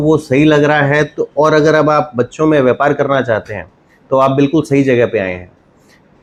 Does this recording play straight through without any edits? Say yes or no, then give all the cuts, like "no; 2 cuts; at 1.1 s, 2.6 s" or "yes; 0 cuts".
yes; 0 cuts